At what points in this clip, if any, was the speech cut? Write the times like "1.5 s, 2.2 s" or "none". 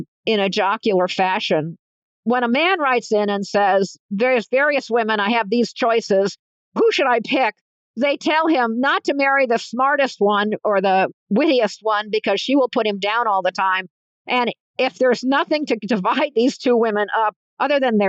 1.9 s